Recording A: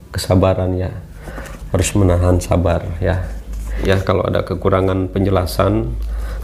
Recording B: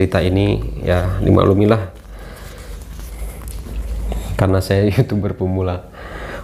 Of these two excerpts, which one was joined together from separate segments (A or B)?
A